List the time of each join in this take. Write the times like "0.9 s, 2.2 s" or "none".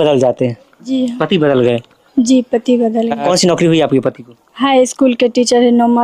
3.2 s

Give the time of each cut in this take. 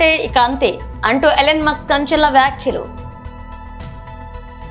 3.7 s

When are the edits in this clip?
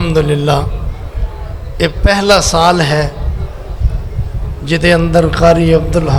none

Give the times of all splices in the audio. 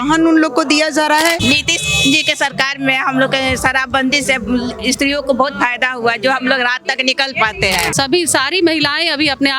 1.4 s, 7.9 s

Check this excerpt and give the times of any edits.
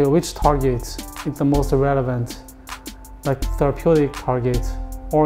none

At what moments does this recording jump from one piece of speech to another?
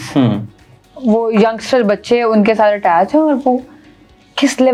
none

